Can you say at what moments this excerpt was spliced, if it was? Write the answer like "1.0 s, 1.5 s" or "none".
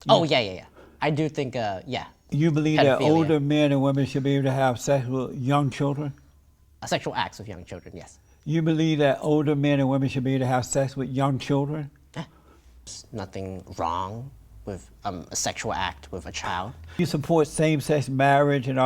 13.0 s, 17.0 s